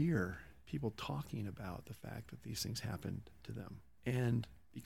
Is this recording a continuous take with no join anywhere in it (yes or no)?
yes